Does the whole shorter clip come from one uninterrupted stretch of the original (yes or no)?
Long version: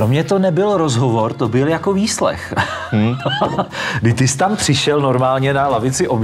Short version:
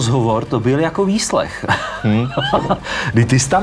yes